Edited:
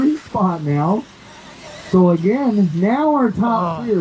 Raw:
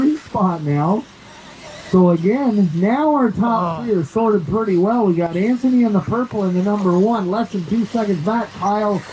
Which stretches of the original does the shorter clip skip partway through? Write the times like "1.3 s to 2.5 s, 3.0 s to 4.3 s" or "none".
none